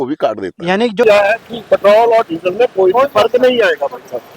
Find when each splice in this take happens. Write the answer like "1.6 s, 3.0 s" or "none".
1.0 s